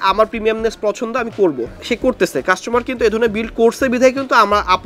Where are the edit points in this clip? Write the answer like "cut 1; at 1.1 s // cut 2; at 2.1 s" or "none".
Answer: cut 1; at 1.7 s